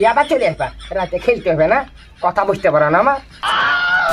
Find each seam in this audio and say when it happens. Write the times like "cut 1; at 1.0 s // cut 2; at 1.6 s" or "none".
cut 1; at 3.2 s